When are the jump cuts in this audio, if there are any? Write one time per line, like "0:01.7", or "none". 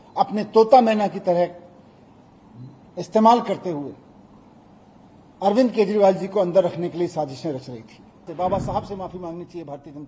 0:08.3